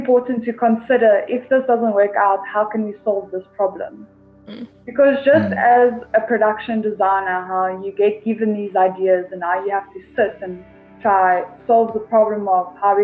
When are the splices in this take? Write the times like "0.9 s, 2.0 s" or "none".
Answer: none